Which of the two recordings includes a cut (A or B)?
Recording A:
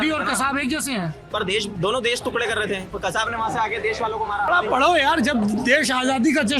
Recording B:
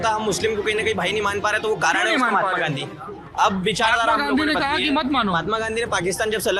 A